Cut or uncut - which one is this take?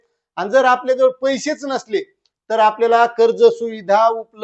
uncut